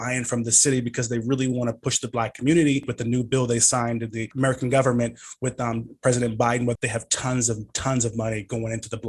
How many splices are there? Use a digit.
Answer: 3